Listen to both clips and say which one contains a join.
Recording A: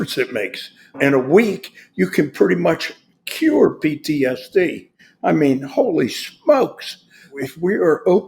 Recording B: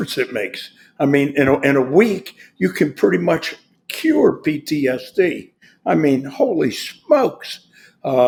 A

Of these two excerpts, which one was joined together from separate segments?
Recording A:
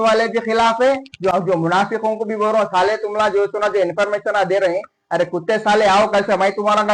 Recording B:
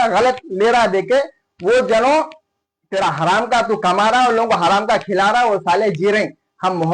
A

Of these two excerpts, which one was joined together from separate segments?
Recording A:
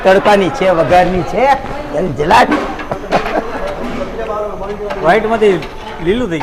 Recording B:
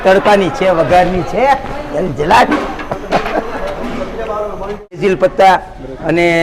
B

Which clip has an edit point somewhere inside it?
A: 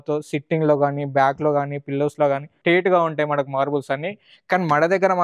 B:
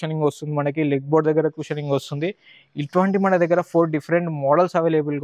A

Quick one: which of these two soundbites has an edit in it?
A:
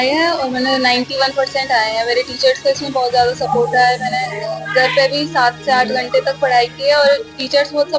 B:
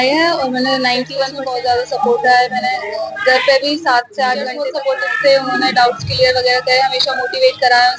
B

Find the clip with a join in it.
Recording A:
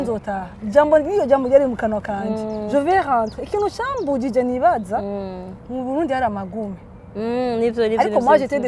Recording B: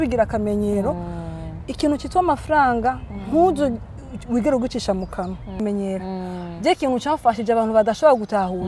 B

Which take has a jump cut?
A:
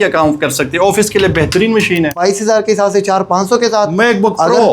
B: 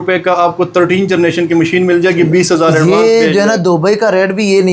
A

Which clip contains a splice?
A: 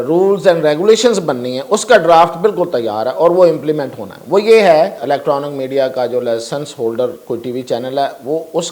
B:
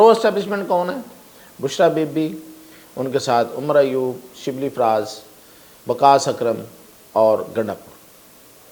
A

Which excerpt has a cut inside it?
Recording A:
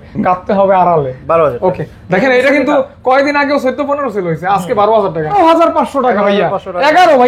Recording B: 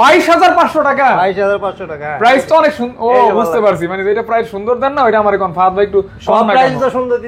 A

